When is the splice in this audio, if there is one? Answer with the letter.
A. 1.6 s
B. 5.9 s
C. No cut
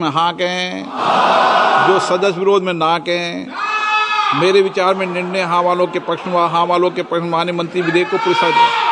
C